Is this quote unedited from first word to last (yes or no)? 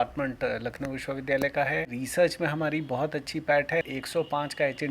no